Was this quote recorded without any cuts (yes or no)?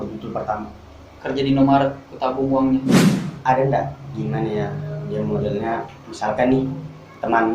no